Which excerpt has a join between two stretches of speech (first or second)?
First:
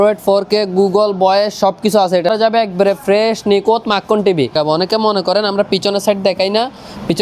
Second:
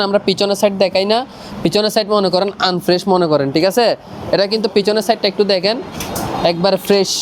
first